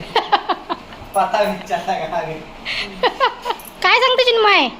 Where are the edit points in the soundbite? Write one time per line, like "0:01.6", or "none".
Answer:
0:03.7